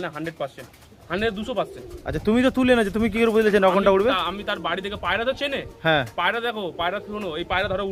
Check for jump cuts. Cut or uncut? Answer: uncut